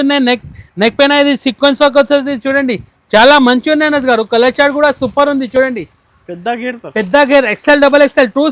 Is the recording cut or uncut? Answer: uncut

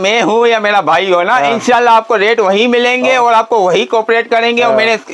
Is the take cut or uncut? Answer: uncut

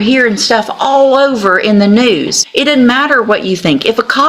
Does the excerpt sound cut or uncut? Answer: cut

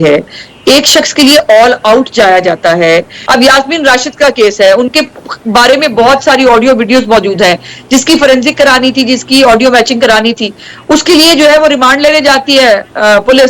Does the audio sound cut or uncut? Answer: cut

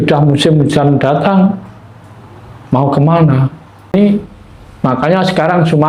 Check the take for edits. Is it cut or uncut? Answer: cut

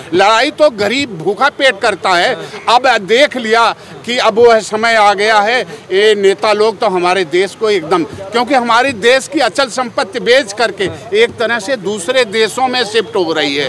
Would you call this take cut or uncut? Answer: uncut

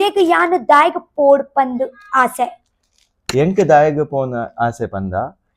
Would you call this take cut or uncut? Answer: uncut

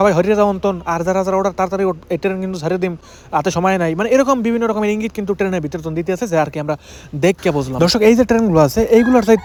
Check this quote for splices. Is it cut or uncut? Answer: uncut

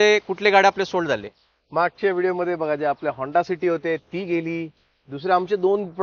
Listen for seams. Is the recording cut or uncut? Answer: uncut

